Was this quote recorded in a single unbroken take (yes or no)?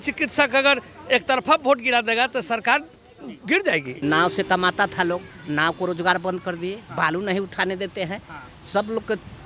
no